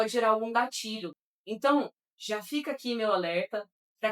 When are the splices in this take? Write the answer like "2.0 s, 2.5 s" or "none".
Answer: 1.1 s